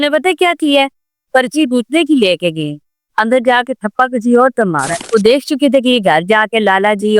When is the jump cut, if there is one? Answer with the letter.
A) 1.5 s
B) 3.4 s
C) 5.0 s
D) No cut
C